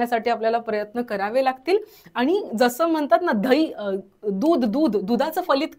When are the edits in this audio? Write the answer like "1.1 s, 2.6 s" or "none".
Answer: none